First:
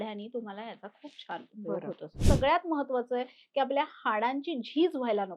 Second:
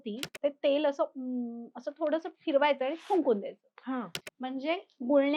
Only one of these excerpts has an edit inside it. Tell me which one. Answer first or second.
first